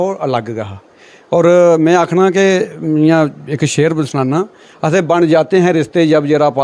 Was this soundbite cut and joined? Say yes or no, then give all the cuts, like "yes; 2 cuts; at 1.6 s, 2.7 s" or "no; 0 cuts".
no; 0 cuts